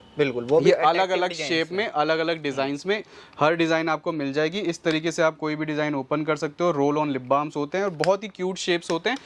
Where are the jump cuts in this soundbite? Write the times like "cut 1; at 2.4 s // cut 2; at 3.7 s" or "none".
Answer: none